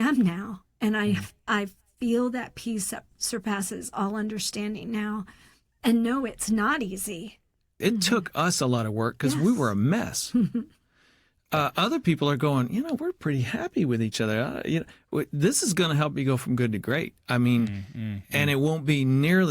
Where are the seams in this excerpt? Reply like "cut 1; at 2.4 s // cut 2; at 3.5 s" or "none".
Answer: cut 1; at 7.7 s